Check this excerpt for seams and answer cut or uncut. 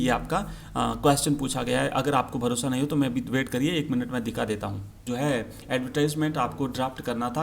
cut